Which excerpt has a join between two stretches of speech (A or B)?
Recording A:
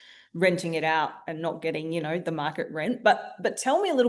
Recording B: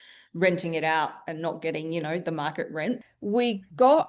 B